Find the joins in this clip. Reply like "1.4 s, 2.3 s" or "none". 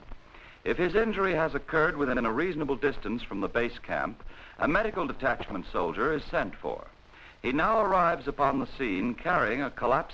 6.1 s